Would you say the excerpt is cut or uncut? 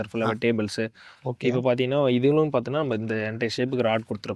uncut